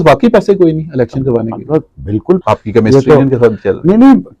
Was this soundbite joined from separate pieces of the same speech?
yes; 1 cut; at 2.4 s

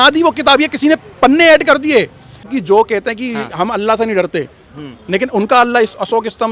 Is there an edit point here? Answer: yes; 1 cut; at 2.5 s

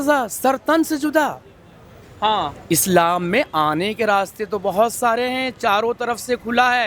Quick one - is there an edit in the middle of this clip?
no; 0 cuts

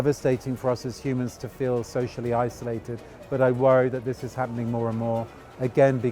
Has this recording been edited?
no; 0 cuts

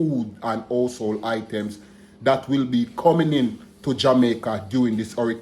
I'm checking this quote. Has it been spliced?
no; 0 cuts

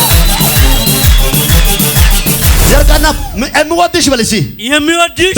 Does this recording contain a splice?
yes; 1 cut; at 2.6 s

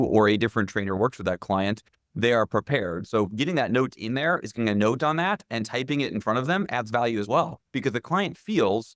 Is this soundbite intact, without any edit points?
yes; 0 cuts

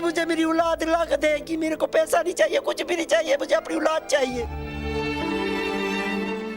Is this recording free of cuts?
yes; 0 cuts

